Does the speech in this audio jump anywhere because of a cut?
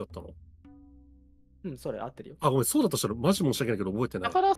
no; 0 cuts

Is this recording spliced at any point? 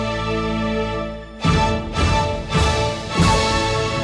no; 0 cuts

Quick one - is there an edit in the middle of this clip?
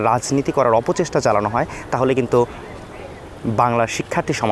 no; 0 cuts

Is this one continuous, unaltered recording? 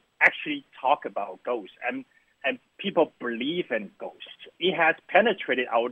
no; 1 cut; at 4.5 s

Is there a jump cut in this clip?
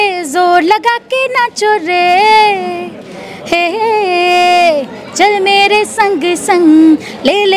no; 0 cuts

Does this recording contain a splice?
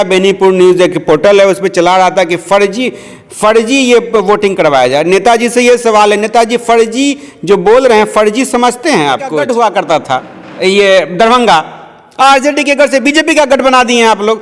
yes; 1 cut; at 9.3 s

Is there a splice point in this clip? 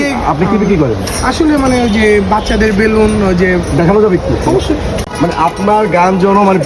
yes; 1 cut; at 5.1 s

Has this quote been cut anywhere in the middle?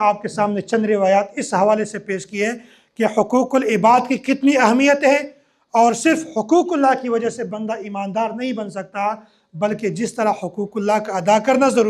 no; 0 cuts

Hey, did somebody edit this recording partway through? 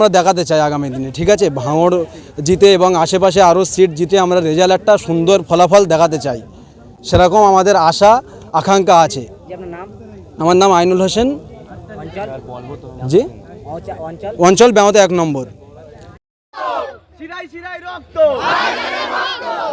no; 0 cuts

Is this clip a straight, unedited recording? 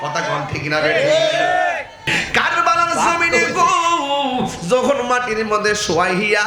no; 1 cut; at 2.1 s

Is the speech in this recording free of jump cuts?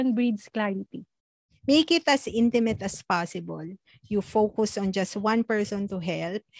no; 1 cut; at 1.5 s

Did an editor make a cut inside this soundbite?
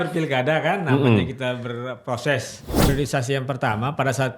yes; 1 cut; at 2.9 s

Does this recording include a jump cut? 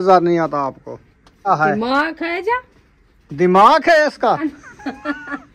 yes; 2 cuts; at 1.5 s, 4.4 s

